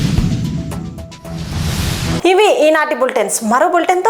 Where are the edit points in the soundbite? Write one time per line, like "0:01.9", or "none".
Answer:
none

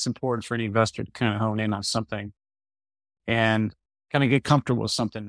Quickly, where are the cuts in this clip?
0:03.9

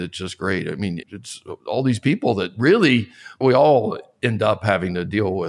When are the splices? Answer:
0:01.0
0:03.4

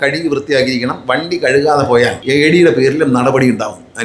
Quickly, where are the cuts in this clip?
0:02.2

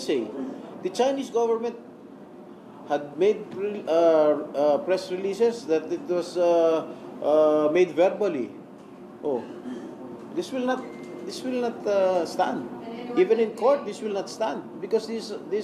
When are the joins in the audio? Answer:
none

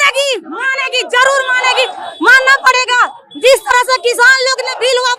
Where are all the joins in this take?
none

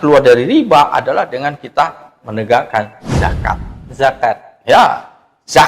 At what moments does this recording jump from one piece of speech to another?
none

